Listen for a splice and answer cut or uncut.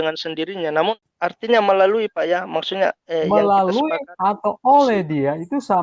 cut